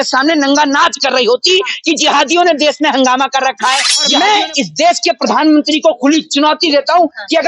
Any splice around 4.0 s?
yes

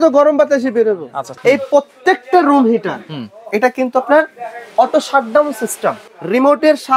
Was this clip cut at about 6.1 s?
yes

